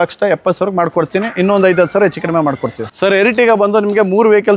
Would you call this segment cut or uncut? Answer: cut